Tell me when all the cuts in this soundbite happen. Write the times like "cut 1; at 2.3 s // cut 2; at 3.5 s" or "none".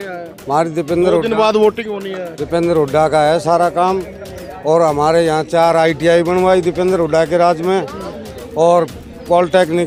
none

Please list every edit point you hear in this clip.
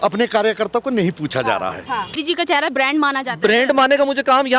cut 1; at 2.1 s

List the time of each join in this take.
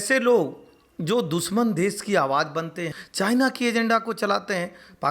cut 1; at 2.9 s

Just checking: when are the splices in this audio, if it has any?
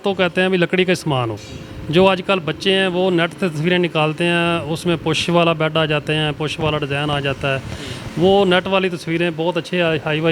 none

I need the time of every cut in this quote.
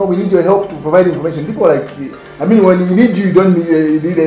none

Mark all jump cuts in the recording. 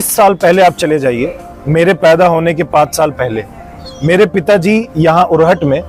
none

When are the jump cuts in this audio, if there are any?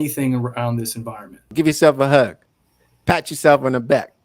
cut 1; at 1.5 s

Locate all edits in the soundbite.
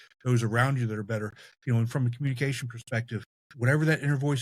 cut 1; at 3.4 s

